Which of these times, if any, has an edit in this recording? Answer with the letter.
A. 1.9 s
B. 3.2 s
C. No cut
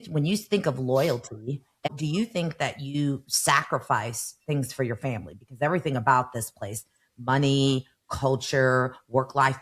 A